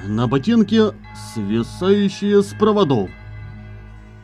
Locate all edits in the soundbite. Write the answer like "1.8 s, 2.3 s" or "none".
none

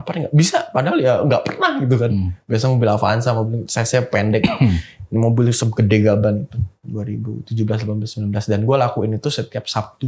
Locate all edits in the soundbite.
none

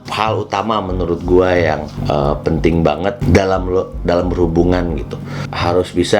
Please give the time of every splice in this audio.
none

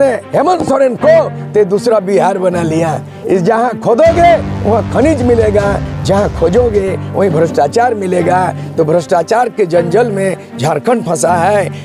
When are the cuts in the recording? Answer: none

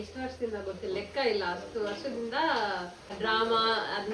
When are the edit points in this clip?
3.1 s

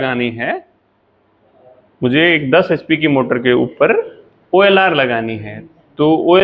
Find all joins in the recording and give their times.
none

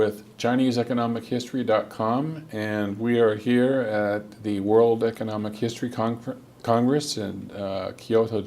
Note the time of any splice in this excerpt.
7.4 s

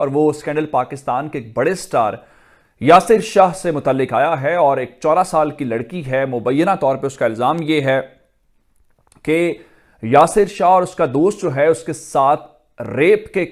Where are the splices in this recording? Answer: none

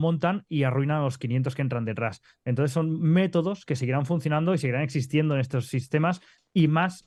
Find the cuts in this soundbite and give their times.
none

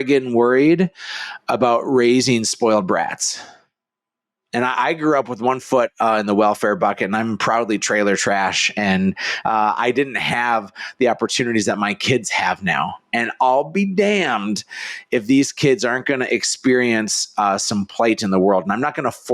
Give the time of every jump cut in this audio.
none

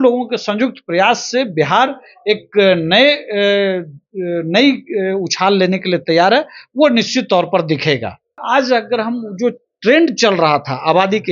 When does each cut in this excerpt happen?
8.4 s

